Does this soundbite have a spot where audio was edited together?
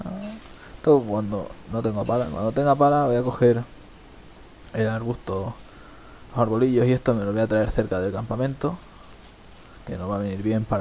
yes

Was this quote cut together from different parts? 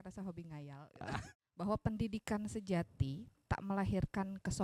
yes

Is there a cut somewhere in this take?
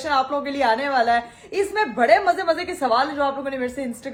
no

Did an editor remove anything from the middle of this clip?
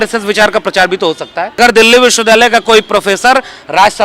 yes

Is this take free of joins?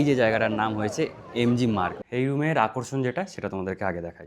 no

